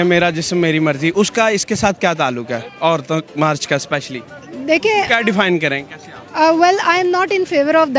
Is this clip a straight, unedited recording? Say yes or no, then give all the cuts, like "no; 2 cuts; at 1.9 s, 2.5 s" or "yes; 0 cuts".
yes; 0 cuts